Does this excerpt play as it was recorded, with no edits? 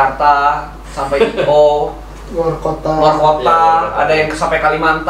yes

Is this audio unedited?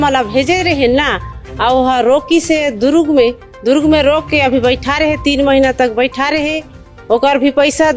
yes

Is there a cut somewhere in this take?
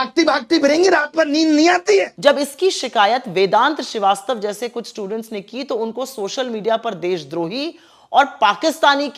yes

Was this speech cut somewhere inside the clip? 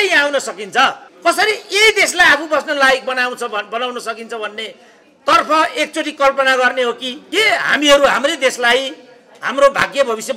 yes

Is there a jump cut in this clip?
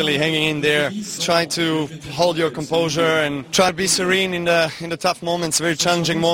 yes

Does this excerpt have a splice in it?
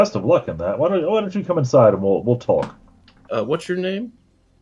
yes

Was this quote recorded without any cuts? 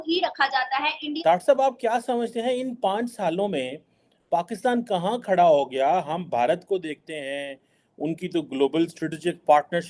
no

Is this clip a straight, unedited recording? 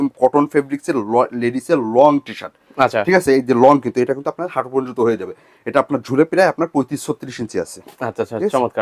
yes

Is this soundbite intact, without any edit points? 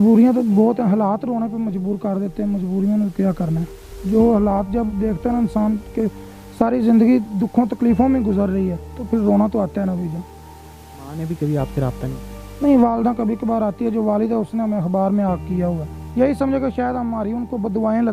no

